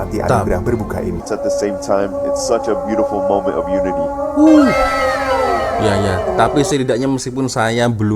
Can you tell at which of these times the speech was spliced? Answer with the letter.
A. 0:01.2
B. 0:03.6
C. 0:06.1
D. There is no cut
A